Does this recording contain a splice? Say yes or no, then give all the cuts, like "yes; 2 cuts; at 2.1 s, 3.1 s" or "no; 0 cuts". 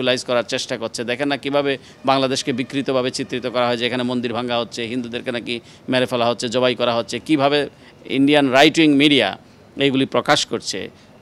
no; 0 cuts